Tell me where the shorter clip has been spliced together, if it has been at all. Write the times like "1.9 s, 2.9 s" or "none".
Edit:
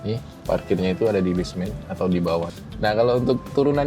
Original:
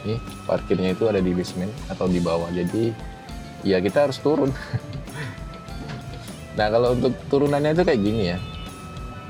2.5 s